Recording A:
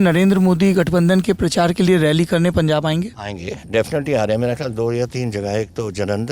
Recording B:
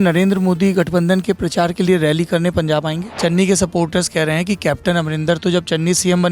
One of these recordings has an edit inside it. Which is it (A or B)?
B